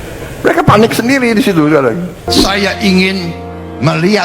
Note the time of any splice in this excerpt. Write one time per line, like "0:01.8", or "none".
0:02.3

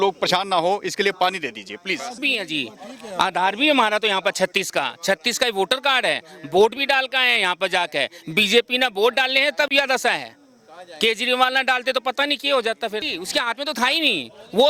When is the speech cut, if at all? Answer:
0:02.2
0:13.1

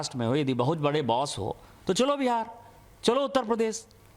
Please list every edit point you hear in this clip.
none

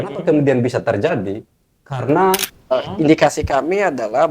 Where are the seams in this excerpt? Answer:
0:02.7

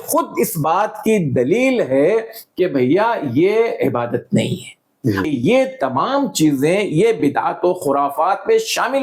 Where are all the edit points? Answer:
0:05.3

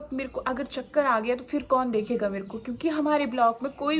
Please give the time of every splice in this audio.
none

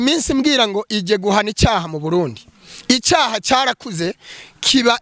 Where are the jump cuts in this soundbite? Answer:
none

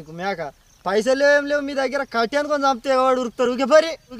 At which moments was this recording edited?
none

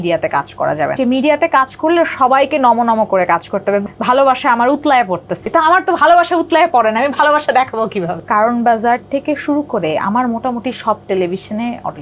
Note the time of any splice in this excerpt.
0:01.0
0:03.9
0:05.4
0:08.1

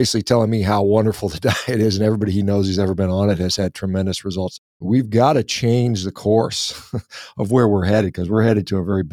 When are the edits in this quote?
0:04.8

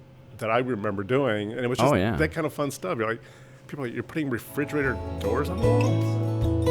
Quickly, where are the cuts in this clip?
0:05.1

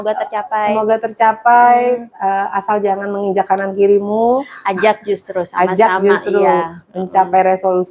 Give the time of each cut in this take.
none

